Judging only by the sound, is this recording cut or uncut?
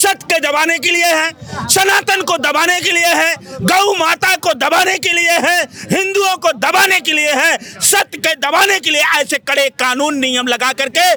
uncut